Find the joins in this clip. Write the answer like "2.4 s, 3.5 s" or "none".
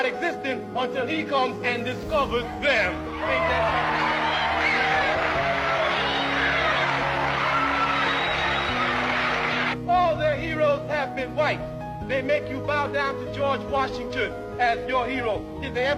none